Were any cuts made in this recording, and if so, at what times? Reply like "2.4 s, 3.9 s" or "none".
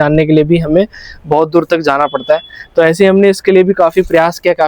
none